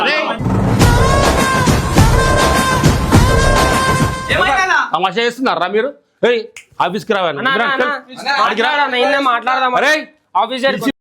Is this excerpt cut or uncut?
cut